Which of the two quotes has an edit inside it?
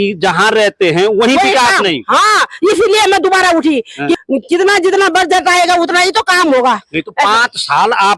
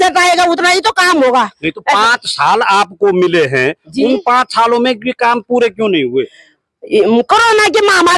first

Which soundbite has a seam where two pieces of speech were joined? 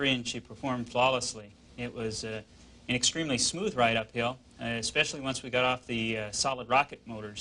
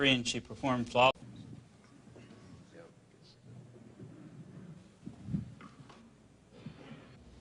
first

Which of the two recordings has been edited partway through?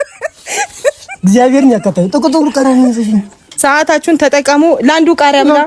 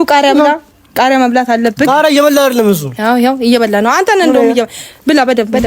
first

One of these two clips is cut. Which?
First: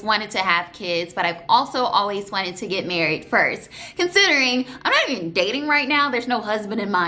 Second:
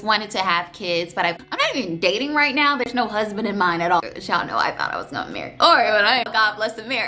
second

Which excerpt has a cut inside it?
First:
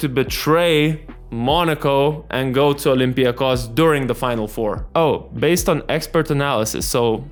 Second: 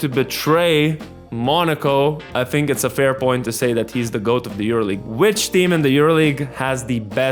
second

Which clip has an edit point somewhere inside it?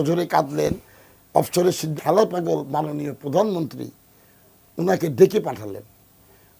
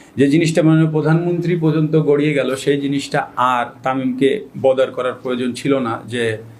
first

